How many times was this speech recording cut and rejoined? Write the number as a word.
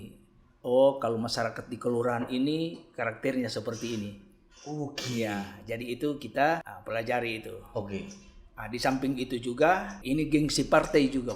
two